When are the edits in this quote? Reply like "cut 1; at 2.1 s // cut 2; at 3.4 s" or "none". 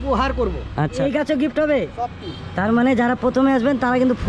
cut 1; at 1.0 s